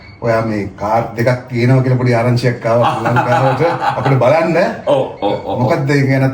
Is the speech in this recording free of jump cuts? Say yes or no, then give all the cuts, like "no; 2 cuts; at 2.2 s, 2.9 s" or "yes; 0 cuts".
yes; 0 cuts